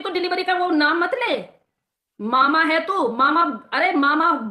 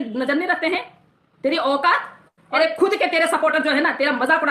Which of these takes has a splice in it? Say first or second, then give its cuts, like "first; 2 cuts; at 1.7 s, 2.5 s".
second; 1 cut; at 2.4 s